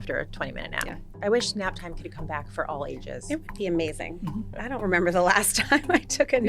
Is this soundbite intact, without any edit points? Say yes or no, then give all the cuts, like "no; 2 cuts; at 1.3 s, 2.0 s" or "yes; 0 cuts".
no; 1 cut; at 1.0 s